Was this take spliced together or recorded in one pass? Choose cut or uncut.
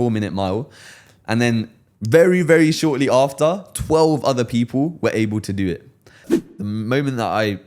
cut